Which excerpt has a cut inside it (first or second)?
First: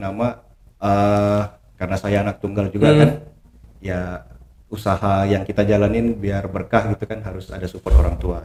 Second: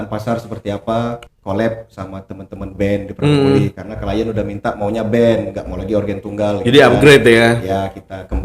second